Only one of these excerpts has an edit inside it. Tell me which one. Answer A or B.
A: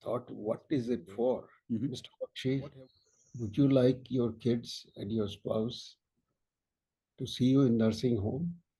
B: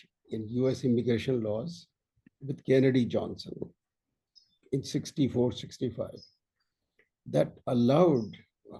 A